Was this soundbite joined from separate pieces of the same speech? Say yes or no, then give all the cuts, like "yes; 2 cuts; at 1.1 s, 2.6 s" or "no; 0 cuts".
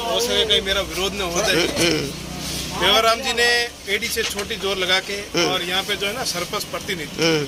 no; 0 cuts